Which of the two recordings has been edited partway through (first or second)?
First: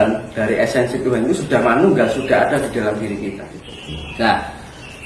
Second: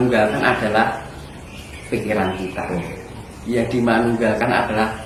first